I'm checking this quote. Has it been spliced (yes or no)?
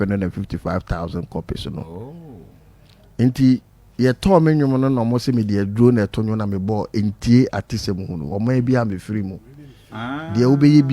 no